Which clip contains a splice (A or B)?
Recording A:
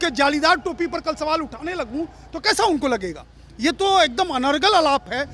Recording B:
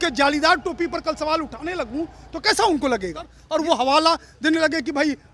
B